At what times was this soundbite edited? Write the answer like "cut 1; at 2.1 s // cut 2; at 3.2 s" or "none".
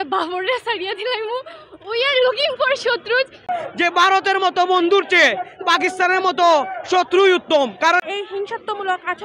cut 1; at 3.4 s // cut 2; at 8.0 s